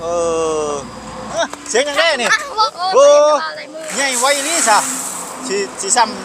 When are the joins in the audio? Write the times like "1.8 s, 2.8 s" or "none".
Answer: 1.3 s, 2.7 s